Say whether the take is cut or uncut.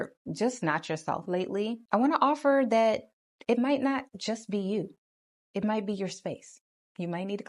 cut